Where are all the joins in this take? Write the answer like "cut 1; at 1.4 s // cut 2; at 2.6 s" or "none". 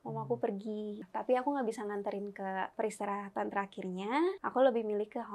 cut 1; at 1.0 s // cut 2; at 2.7 s // cut 3; at 4.4 s